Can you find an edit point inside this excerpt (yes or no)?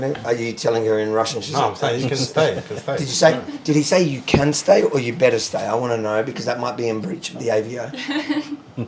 no